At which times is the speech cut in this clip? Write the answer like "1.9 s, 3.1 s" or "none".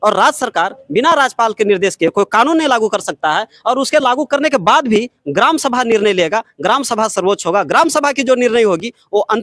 none